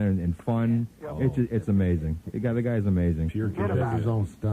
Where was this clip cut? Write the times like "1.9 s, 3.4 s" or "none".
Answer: 2.5 s